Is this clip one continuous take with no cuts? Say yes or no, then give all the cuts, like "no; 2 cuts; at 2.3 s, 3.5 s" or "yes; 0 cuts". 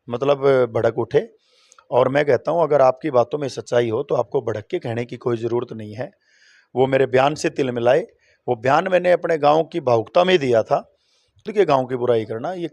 no; 1 cut; at 11.5 s